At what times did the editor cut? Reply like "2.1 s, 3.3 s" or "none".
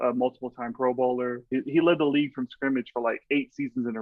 1.5 s